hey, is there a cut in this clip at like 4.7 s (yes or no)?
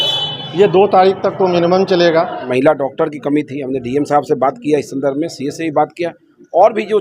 no